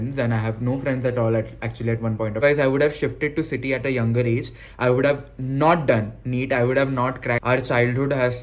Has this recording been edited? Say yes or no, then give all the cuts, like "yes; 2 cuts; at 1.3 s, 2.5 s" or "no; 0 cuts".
yes; 2 cuts; at 2.4 s, 7.4 s